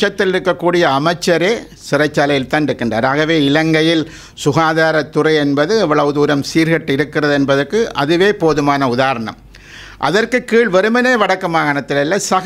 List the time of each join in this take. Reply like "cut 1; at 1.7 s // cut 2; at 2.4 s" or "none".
none